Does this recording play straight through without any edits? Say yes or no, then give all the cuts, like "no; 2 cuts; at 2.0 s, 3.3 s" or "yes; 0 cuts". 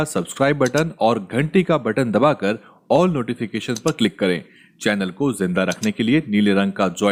yes; 0 cuts